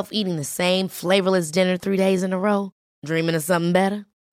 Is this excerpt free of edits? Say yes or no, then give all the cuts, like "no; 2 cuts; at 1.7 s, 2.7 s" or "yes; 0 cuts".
yes; 0 cuts